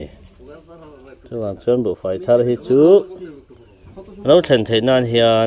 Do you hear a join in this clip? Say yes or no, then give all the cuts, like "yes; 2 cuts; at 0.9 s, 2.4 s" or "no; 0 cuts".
no; 0 cuts